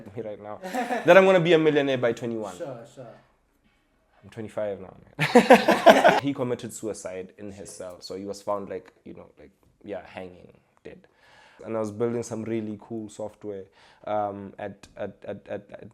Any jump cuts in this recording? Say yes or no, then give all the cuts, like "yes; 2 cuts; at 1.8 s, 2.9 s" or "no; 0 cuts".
yes; 2 cuts; at 6.2 s, 11.6 s